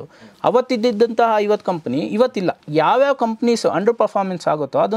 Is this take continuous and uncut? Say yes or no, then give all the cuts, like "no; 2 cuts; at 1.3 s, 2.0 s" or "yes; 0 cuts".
no; 1 cut; at 2.6 s